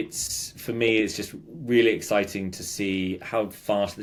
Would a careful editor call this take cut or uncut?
uncut